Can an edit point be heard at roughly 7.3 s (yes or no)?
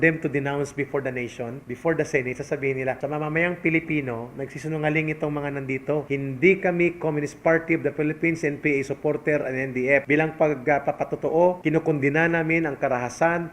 no